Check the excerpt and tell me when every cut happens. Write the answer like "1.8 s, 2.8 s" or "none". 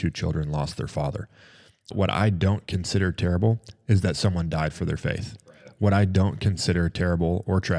1.9 s